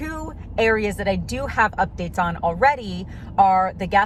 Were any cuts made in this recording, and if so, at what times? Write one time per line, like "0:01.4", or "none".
none